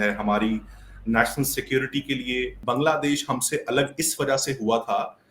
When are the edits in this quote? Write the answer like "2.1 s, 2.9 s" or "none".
2.6 s